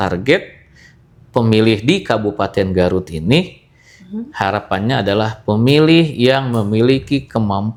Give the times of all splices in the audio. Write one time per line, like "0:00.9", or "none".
none